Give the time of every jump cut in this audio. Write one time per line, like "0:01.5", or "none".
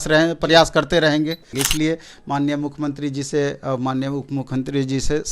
0:01.6